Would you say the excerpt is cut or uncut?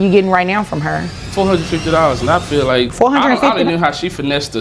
cut